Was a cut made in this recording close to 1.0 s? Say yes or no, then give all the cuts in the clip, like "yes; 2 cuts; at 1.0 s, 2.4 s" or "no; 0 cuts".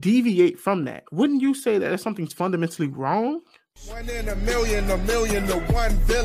no; 1 cut; at 3.6 s